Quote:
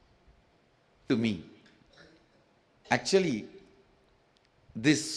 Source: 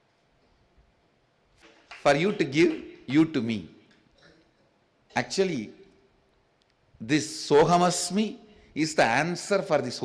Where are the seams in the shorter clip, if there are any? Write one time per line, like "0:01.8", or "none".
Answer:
0:01.0

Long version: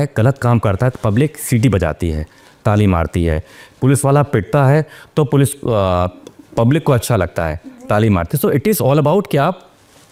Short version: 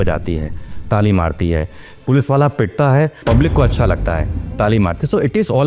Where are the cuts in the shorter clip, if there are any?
0:03.2

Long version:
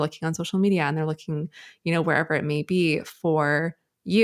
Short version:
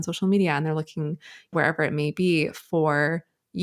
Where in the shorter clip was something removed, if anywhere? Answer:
0:01.5

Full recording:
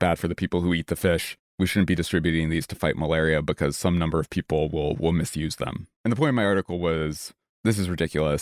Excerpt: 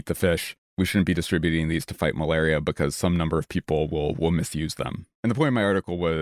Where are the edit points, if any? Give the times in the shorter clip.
none

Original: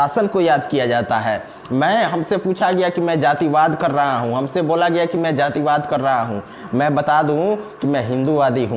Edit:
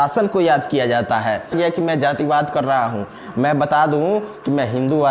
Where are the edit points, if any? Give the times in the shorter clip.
0:01.5

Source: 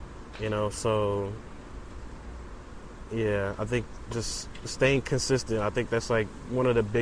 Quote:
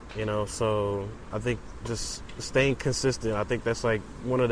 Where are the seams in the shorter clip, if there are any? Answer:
0:01.3

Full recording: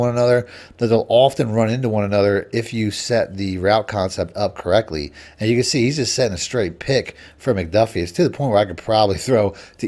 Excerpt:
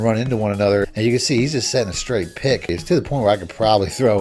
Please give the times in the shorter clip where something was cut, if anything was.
0:00.9
0:02.7

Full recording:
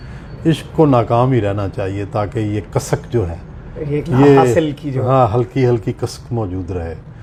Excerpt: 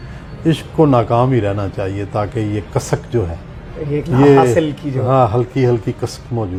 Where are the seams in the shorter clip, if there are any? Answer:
none

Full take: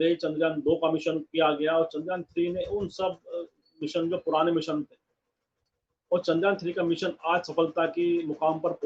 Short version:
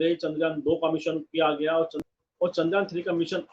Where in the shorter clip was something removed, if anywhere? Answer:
0:02.0

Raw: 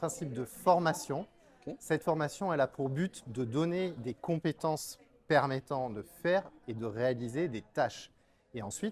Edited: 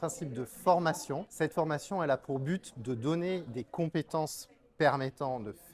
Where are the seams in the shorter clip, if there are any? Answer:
0:01.3

